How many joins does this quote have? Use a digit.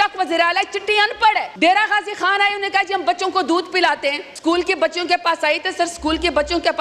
2